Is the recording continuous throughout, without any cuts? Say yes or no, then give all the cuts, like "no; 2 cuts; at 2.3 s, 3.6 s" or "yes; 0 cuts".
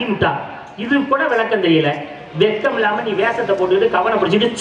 yes; 0 cuts